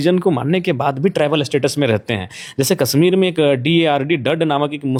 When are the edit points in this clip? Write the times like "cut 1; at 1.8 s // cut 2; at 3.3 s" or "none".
none